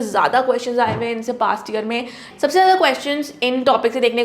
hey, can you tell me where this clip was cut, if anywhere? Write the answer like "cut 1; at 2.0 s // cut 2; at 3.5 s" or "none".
cut 1; at 2.2 s